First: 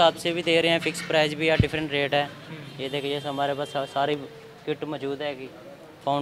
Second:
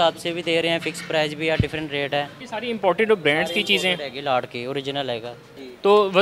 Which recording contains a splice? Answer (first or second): second